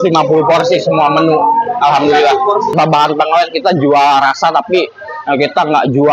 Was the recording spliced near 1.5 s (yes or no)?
no